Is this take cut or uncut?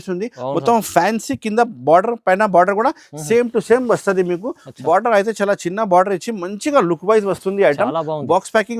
uncut